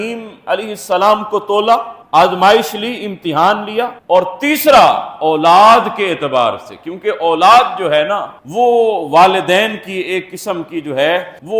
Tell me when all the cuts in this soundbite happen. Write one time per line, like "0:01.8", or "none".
none